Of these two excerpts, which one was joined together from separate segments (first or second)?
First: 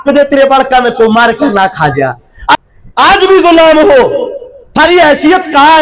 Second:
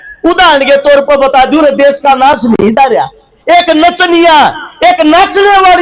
first